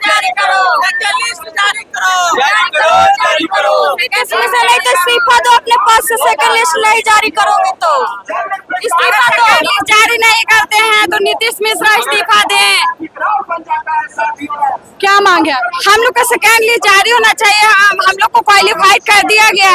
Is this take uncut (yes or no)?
yes